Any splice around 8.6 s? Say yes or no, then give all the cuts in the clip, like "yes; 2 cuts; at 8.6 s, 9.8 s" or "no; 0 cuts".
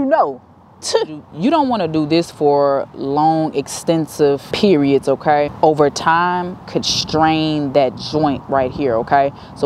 no; 3 cuts; at 1.4 s, 4.5 s, 5.5 s